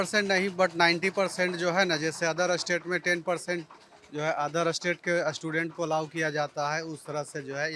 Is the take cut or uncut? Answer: uncut